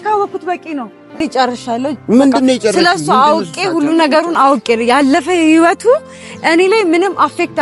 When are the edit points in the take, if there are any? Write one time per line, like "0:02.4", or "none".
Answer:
0:01.2